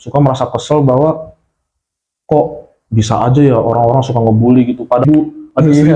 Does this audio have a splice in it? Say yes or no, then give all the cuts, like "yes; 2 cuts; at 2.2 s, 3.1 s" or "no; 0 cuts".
yes; 1 cut; at 5.0 s